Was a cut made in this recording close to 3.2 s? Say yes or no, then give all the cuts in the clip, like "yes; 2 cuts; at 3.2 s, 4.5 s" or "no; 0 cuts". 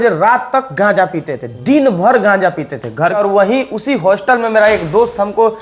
yes; 1 cut; at 3.2 s